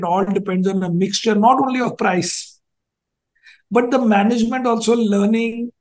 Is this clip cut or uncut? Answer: uncut